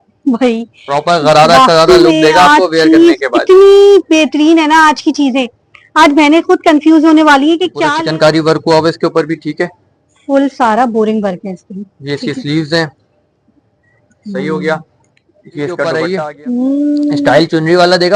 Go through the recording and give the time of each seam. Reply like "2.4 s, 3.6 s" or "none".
7.8 s, 15.9 s

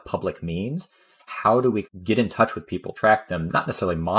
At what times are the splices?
1.9 s

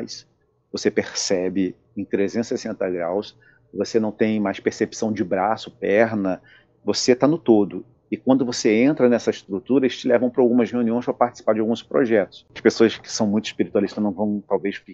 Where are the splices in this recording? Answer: 12.4 s

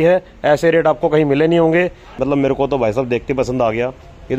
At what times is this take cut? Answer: 2.0 s

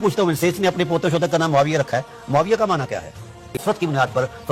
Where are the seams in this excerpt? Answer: 3.6 s

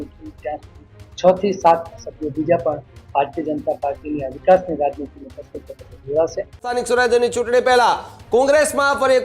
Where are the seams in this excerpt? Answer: 6.7 s

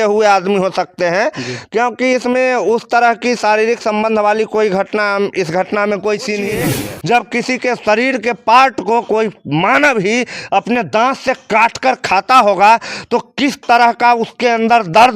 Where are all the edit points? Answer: 6.7 s

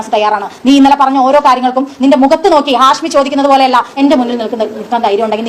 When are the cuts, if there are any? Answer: 3.9 s

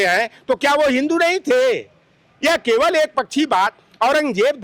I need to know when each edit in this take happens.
none

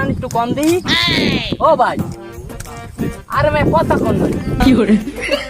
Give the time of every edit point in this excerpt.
4.6 s

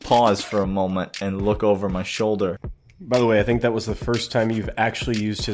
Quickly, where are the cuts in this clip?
2.7 s

